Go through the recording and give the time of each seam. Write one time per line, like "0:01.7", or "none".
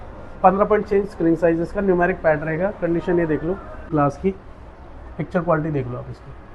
0:03.9